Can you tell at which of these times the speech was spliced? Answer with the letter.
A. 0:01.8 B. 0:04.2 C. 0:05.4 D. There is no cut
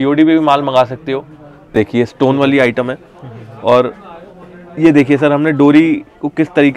A